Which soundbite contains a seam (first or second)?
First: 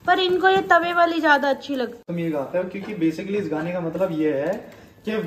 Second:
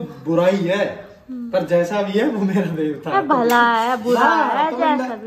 first